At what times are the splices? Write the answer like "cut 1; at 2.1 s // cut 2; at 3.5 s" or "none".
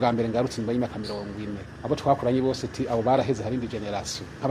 cut 1; at 1.7 s